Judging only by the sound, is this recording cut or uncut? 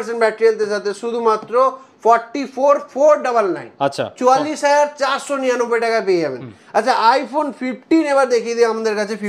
uncut